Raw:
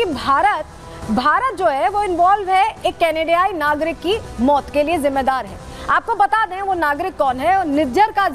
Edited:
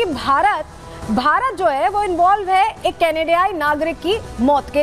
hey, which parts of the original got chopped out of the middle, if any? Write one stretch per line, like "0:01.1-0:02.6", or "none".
none